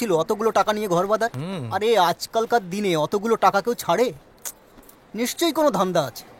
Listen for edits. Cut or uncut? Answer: uncut